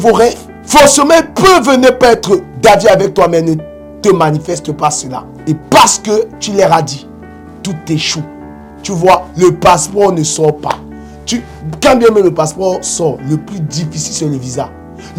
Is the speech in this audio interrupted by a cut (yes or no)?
no